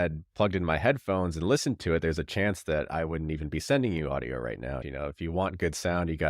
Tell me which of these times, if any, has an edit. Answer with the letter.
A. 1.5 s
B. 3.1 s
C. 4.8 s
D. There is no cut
C